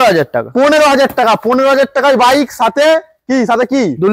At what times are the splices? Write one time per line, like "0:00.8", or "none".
none

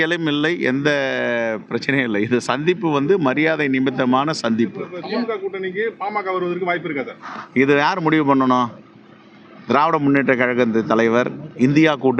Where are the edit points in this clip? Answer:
none

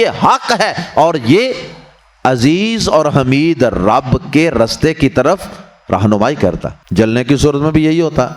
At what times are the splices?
0:06.7

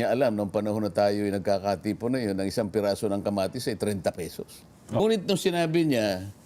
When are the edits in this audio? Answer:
0:05.0

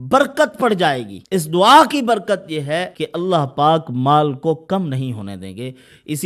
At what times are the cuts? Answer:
0:01.1
0:03.0

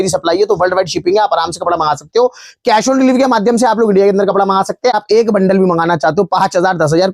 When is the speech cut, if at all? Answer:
0:05.0

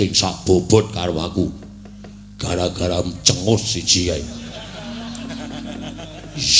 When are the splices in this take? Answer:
none

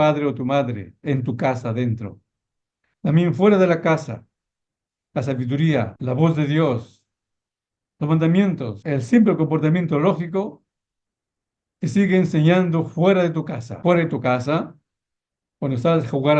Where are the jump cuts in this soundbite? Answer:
0:05.9
0:08.7
0:13.6

